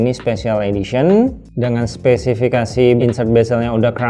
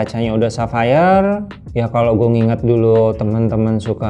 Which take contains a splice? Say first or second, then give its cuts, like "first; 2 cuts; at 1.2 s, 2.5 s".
first; 1 cut; at 3.0 s